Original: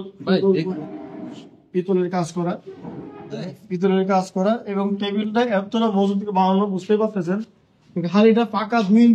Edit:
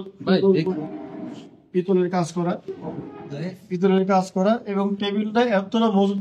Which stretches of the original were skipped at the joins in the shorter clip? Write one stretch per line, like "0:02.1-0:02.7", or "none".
none